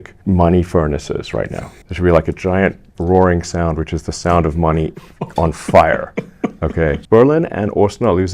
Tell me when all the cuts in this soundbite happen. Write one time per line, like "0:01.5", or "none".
0:01.8
0:07.0